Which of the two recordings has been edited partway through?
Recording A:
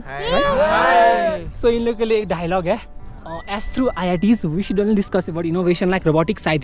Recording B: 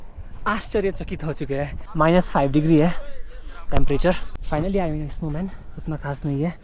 B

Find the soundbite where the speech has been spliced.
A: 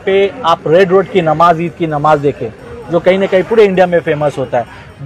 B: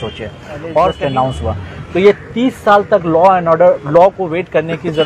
B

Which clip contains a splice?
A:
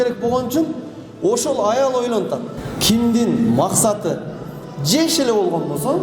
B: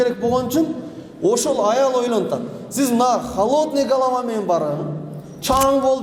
A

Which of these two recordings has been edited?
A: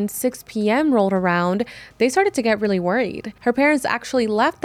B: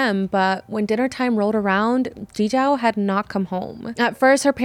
A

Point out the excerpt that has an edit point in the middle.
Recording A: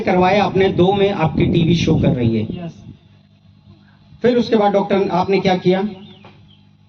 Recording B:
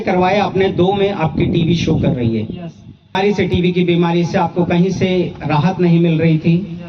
B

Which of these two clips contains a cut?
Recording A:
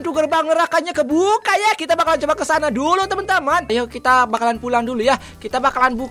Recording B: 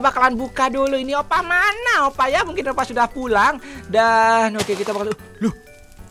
A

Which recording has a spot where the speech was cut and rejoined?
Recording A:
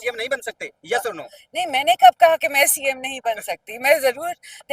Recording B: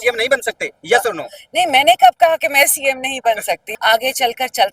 B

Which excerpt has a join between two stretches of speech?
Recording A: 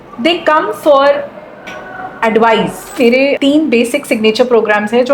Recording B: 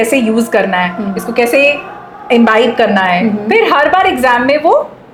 A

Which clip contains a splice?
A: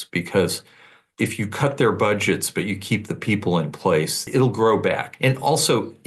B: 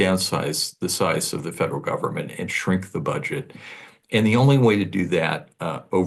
A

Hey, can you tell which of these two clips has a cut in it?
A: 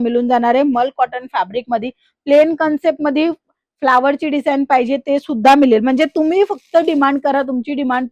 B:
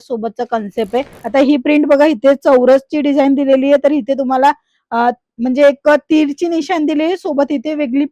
B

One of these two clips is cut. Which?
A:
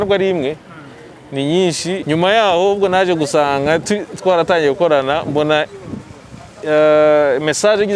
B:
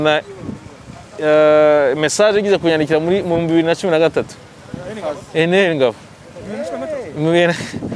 A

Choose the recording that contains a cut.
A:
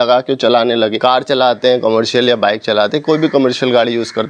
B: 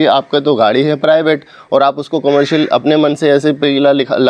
A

